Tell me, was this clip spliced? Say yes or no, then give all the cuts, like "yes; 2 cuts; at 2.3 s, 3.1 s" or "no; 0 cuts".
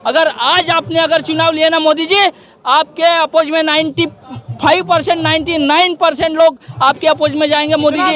no; 0 cuts